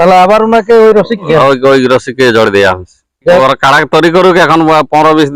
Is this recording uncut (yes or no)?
no